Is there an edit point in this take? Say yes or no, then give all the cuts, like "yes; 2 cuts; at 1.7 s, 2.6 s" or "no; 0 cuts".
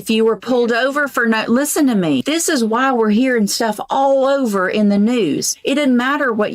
yes; 2 cuts; at 2.2 s, 5.5 s